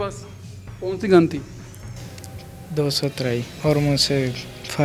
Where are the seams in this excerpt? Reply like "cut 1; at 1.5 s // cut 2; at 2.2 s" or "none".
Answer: cut 1; at 3.5 s